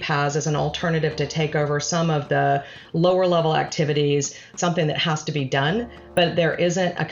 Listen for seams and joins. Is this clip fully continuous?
no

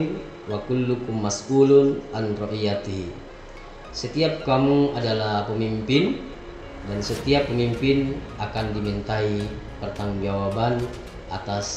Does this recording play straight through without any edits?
yes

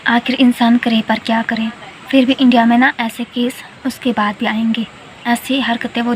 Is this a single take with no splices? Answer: no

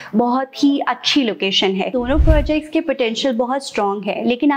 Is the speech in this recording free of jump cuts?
no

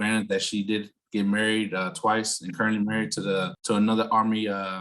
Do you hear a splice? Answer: yes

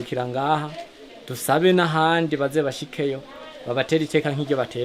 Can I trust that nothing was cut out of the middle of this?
yes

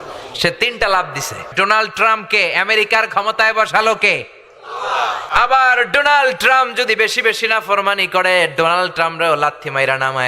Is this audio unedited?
no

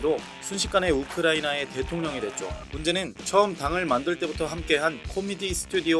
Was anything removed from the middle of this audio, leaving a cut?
yes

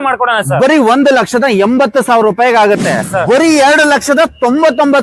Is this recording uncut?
no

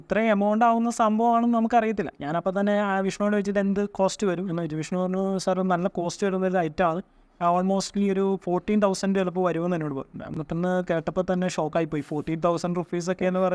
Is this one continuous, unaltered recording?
yes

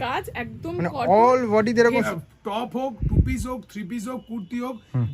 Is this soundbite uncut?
no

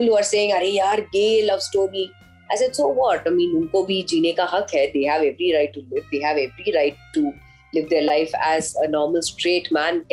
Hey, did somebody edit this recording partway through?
no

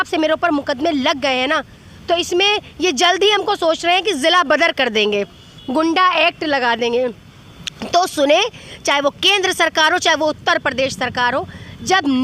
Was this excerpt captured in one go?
yes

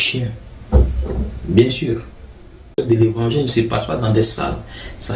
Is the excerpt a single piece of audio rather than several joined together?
no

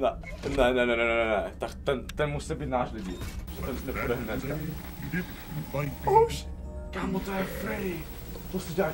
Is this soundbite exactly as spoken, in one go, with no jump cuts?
yes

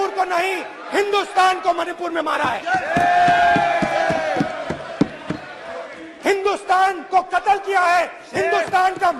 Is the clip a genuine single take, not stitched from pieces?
yes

